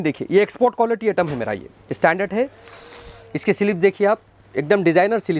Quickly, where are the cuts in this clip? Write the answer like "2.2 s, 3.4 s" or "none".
none